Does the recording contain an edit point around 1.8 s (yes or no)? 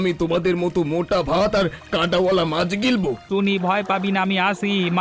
no